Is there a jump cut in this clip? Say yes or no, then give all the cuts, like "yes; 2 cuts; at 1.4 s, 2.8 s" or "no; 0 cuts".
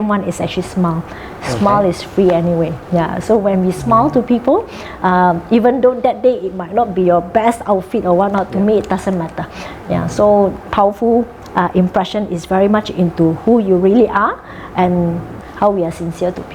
yes; 1 cut; at 15.4 s